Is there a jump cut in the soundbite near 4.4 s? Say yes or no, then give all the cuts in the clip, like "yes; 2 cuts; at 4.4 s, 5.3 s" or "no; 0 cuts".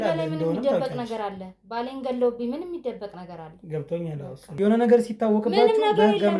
yes; 1 cut; at 4.4 s